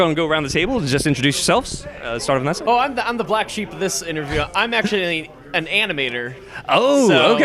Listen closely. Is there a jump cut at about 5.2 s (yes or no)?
no